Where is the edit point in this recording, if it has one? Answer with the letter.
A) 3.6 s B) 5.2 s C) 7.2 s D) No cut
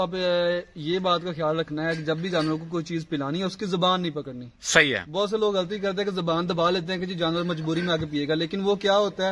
D